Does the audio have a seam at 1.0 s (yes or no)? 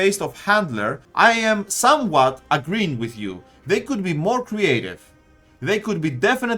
yes